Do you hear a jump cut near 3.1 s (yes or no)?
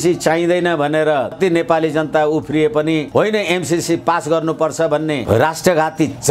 yes